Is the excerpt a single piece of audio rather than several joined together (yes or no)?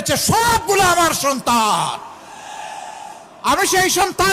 yes